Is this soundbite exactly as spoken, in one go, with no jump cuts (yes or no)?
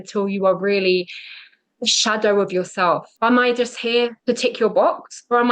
no